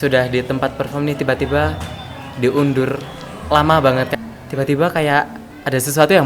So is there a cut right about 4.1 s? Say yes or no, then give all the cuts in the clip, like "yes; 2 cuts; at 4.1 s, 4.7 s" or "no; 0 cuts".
yes; 1 cut; at 4.1 s